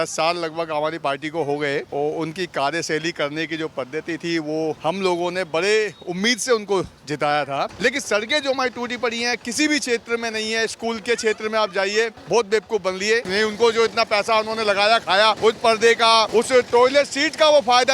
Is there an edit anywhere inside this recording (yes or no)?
yes